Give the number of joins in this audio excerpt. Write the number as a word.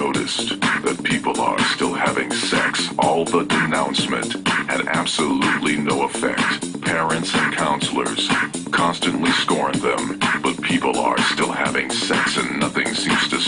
zero